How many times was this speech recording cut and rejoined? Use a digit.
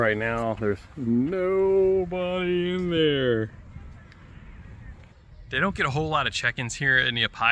0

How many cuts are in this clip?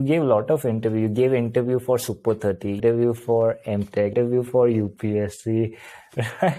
2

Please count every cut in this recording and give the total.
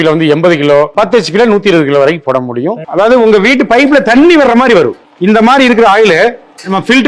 2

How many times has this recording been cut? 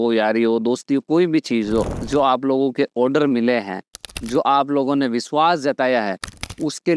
1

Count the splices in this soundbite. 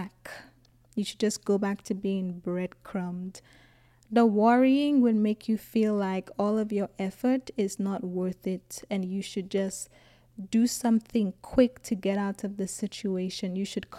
0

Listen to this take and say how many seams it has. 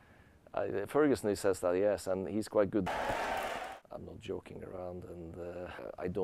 2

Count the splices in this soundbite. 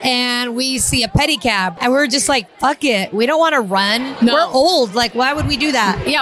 1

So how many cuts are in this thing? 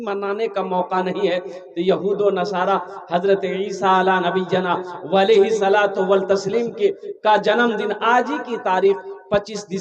0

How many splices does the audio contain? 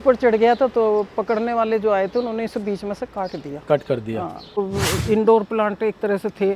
1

